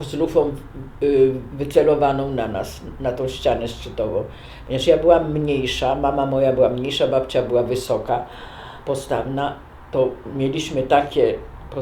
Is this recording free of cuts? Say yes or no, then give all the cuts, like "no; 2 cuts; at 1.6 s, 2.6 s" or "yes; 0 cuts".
yes; 0 cuts